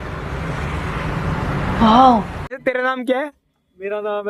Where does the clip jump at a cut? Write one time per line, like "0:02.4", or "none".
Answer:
0:02.6